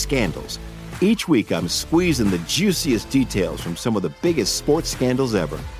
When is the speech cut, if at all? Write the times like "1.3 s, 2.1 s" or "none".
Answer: none